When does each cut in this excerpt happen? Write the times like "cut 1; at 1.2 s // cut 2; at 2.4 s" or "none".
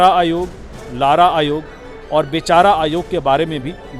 none